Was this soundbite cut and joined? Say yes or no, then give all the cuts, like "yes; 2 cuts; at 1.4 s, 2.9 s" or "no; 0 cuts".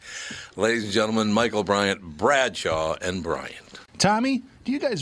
yes; 1 cut; at 3.8 s